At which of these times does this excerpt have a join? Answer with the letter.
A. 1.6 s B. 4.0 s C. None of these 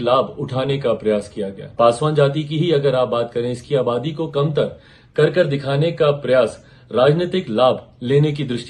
A